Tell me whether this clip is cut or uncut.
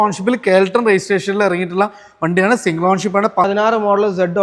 cut